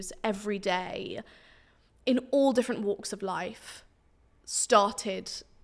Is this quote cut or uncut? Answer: uncut